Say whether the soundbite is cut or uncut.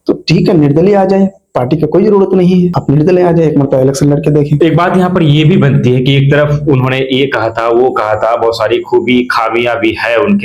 uncut